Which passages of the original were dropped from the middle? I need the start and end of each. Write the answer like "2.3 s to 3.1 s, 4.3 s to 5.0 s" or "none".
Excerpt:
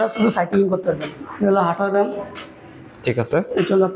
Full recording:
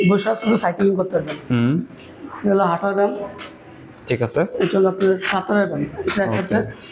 1.4 s to 2.1 s